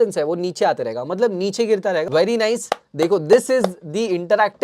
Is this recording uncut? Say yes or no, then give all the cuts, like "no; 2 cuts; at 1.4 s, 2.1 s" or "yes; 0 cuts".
no; 1 cut; at 2.1 s